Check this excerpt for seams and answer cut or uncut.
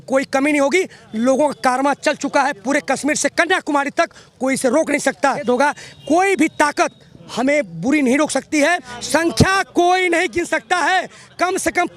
cut